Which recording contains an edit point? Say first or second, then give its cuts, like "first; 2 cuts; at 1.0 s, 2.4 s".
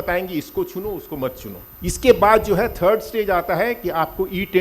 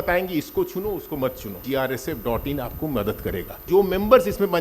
second; 2 cuts; at 1.6 s, 3.7 s